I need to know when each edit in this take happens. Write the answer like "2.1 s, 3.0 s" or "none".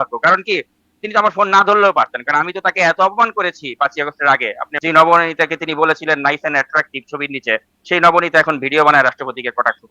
4.6 s